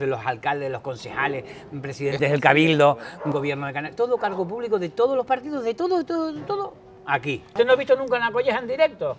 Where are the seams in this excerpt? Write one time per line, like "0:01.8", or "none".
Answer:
0:07.5